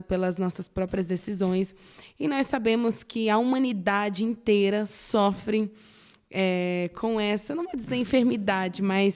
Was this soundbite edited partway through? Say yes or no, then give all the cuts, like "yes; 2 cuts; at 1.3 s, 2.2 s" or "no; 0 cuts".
no; 0 cuts